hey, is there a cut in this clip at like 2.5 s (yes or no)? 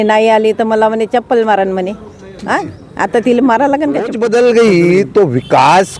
no